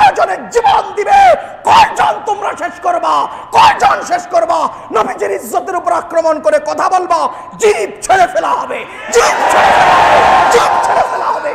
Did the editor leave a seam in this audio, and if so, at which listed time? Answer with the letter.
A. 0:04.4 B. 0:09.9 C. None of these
C